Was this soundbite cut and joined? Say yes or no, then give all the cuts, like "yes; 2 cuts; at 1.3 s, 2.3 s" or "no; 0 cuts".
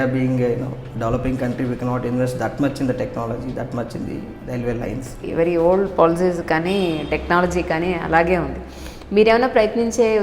yes; 1 cut; at 5.2 s